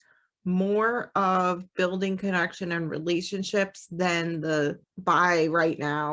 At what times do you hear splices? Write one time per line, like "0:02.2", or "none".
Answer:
0:04.9